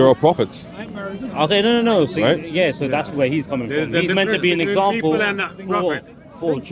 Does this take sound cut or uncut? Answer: uncut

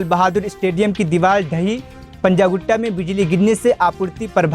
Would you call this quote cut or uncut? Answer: uncut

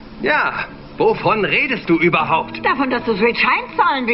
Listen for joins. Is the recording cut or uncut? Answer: cut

